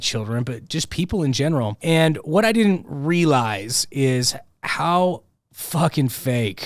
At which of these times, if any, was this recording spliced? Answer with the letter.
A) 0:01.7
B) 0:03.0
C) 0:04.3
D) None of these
A